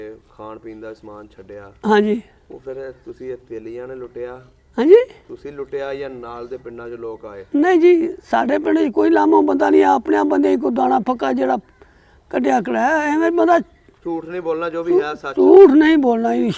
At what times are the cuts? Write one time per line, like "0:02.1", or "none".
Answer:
none